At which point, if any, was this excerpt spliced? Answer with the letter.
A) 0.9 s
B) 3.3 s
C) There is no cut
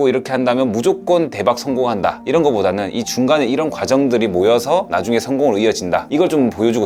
C